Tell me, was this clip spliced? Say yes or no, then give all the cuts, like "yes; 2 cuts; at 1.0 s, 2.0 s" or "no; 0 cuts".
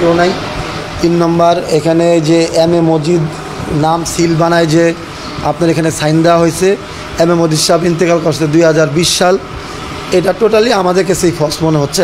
no; 0 cuts